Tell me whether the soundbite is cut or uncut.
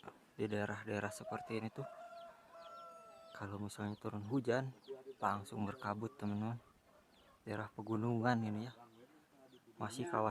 uncut